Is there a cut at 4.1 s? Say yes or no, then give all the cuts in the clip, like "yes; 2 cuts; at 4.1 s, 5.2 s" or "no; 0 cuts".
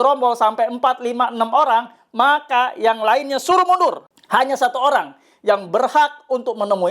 yes; 1 cut; at 4.1 s